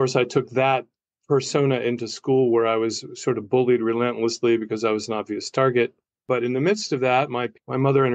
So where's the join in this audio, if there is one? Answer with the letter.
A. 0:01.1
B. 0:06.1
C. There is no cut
B